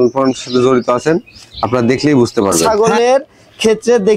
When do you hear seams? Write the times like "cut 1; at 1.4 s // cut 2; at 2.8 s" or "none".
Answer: cut 1; at 2.6 s